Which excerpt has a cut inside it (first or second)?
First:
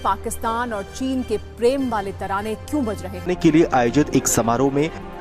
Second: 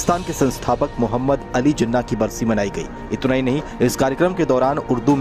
first